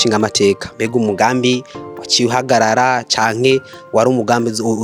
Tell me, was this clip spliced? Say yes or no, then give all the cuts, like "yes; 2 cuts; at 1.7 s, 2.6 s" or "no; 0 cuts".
no; 0 cuts